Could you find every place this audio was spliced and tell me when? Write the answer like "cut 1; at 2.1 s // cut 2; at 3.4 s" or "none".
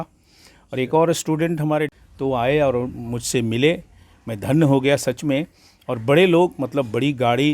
cut 1; at 1.9 s

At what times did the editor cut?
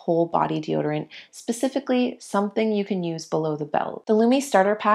cut 1; at 4.0 s

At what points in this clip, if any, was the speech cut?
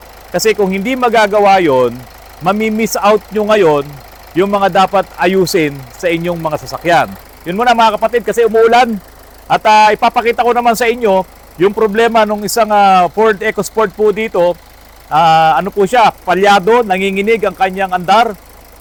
none

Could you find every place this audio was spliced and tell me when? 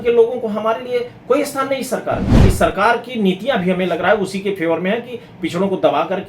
cut 1; at 2.3 s

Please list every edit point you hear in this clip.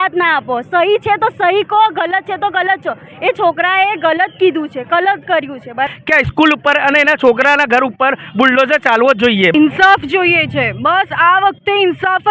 cut 1; at 5.9 s // cut 2; at 9.5 s

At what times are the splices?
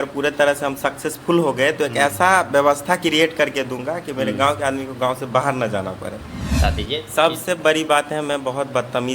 cut 1; at 6.6 s

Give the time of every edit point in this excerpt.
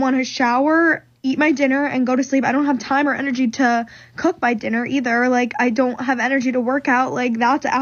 none

